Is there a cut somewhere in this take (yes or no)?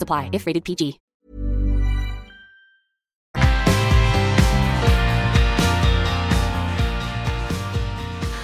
no